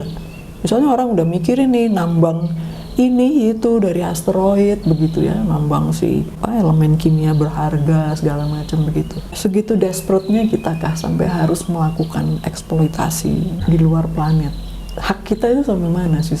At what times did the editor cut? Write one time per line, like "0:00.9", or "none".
0:06.4
0:09.4
0:13.6